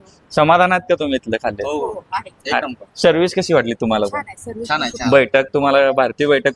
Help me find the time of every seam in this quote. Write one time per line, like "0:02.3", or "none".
none